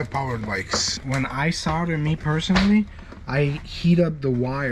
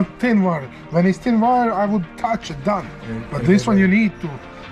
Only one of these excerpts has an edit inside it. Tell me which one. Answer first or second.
first